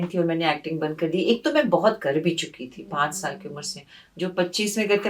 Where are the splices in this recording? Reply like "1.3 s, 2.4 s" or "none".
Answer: none

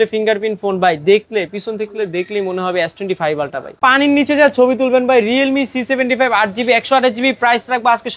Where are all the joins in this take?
3.8 s

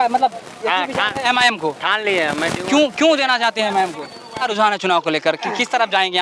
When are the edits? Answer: 4.5 s

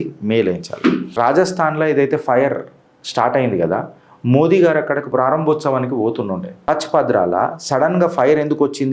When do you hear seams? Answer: 1.1 s, 6.5 s

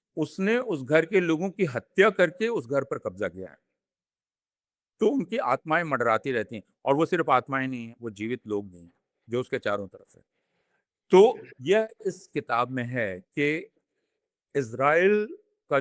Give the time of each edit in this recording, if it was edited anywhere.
none

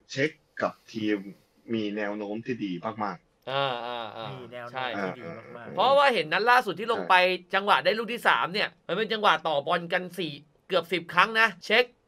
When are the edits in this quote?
none

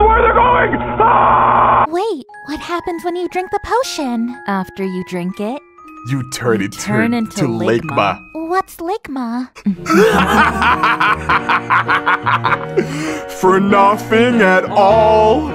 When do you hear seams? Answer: 1.9 s

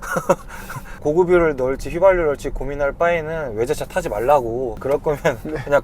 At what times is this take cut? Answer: 1.0 s, 4.7 s

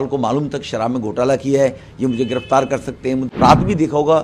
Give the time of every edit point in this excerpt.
3.3 s

